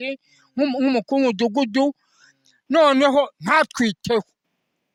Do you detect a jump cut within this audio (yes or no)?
no